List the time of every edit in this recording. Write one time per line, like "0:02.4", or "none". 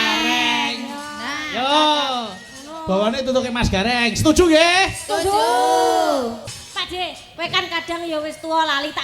0:06.4

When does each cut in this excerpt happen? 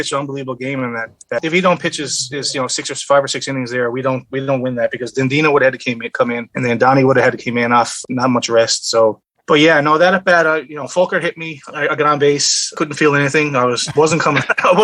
0:01.4

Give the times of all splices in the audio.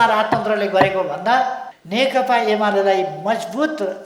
0:01.7

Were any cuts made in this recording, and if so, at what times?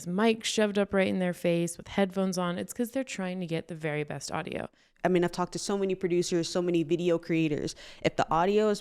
0:04.8

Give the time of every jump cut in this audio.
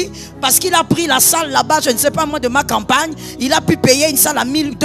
none

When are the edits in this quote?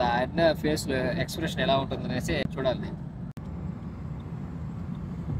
none

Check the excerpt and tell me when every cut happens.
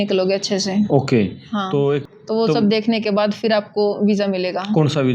0:02.0

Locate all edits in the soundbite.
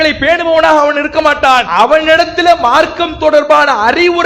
0:01.7

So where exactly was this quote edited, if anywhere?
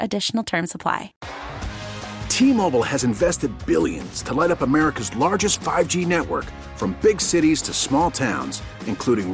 0:01.2

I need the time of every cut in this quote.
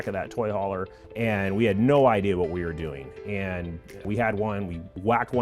0:01.1

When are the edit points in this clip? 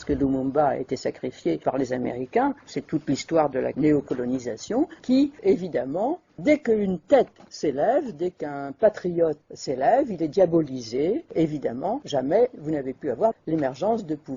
0:07.4

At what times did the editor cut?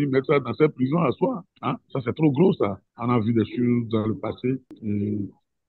0:01.5
0:02.9
0:04.7

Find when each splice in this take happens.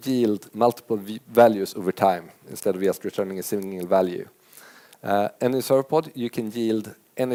none

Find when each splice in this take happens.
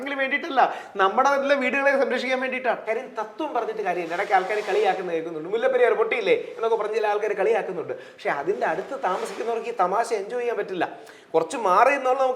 0:02.8

